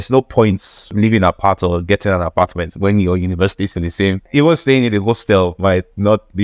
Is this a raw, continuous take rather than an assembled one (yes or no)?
no